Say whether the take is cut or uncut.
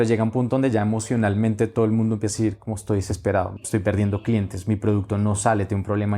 cut